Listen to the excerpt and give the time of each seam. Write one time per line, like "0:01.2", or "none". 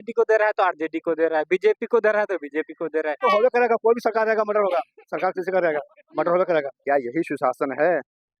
0:03.2
0:06.7